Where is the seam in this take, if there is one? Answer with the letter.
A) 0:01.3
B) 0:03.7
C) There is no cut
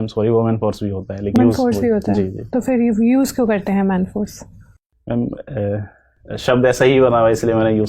A